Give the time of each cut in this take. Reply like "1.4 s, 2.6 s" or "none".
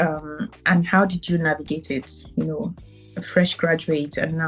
none